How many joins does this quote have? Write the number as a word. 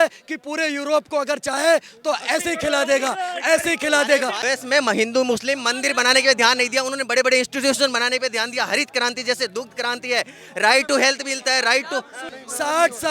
two